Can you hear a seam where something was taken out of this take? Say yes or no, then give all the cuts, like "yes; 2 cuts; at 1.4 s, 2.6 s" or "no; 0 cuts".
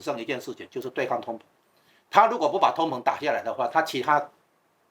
no; 0 cuts